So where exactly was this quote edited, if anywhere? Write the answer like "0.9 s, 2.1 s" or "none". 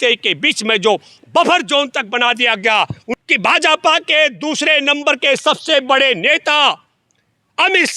3.0 s